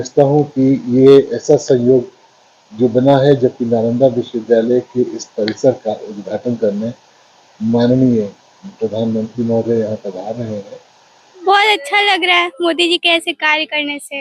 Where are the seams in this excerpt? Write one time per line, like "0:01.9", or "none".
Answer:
0:11.4